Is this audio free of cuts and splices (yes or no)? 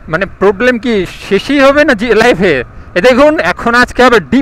yes